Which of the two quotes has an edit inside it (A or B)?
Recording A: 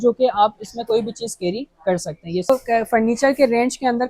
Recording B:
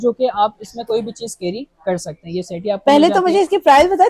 A